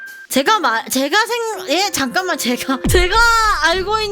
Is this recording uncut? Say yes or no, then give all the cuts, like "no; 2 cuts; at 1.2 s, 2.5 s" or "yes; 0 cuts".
yes; 0 cuts